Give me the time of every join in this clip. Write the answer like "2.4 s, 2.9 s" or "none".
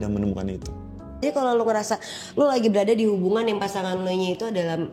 1.2 s